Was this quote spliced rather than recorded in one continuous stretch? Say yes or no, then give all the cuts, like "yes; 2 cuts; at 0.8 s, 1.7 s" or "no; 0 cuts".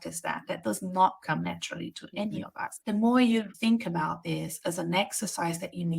yes; 2 cuts; at 2.8 s, 3.5 s